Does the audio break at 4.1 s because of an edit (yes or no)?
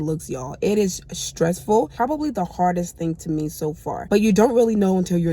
yes